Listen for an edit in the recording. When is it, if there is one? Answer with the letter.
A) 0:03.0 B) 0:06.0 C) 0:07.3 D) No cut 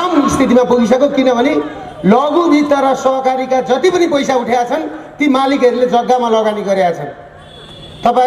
D